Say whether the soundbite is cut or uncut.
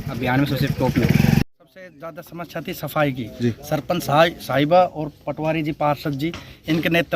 cut